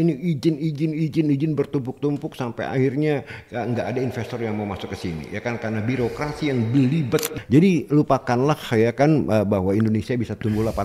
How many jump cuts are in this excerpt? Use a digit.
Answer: 1